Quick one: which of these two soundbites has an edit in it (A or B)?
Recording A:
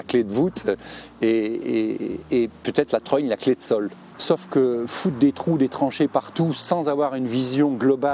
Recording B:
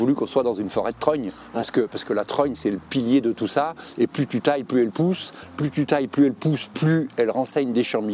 A